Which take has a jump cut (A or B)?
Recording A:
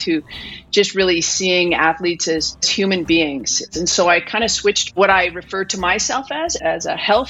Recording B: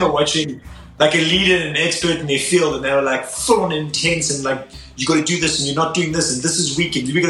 A